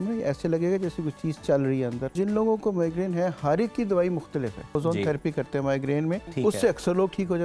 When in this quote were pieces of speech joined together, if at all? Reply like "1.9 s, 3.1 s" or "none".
2.1 s, 4.8 s, 6.3 s